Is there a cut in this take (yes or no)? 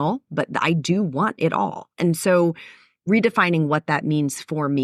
no